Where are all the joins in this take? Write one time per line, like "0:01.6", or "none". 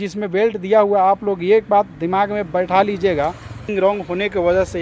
0:03.7